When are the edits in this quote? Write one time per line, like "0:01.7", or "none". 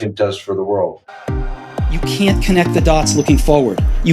0:01.0